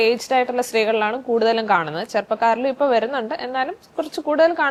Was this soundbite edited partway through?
no; 0 cuts

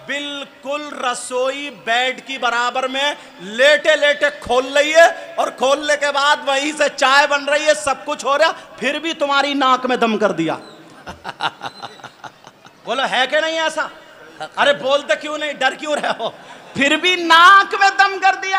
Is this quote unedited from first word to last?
yes; 0 cuts

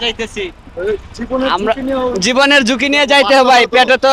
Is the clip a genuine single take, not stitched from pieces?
yes; 0 cuts

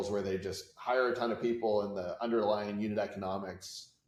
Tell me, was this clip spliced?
no; 0 cuts

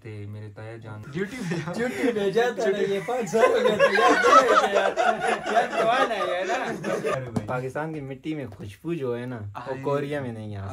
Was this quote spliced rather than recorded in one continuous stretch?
yes; 2 cuts; at 1.0 s, 7.1 s

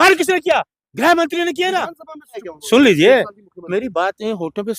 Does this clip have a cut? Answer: yes; 1 cut; at 2.5 s

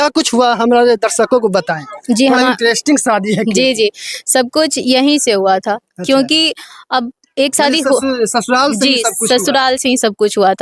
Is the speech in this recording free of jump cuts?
yes; 0 cuts

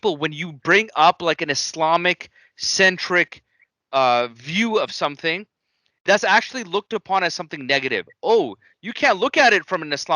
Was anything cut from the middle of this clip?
no; 0 cuts

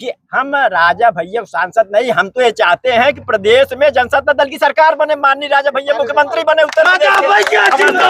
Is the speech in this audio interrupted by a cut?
no; 0 cuts

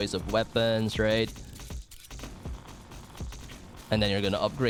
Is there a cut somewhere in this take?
no; 0 cuts

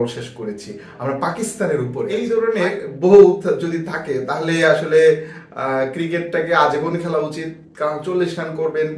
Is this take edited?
yes; 1 cut; at 2.3 s

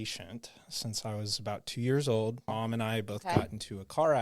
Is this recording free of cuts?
no; 1 cut; at 2.5 s

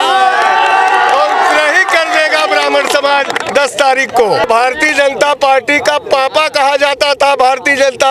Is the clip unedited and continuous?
no; 1 cut; at 4.4 s

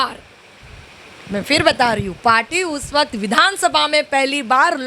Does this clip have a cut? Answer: no; 0 cuts

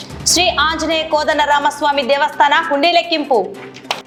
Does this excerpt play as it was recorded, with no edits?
yes; 0 cuts

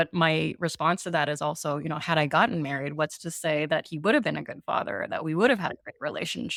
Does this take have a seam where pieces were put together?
no; 0 cuts

